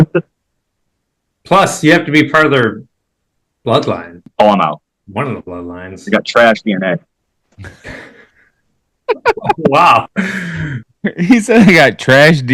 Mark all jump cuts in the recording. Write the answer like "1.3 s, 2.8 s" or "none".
4.2 s